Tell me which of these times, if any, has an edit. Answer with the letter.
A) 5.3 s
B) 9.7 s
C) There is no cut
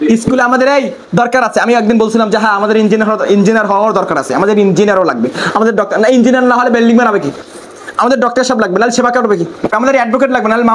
B